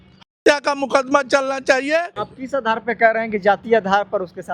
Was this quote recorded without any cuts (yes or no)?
no